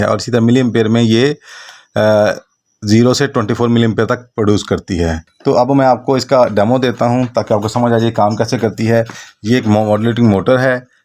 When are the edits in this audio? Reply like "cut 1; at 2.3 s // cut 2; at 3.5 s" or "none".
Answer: cut 1; at 5.3 s